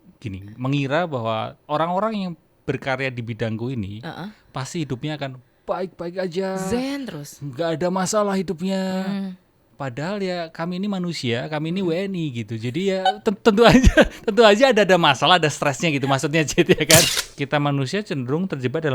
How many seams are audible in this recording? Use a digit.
1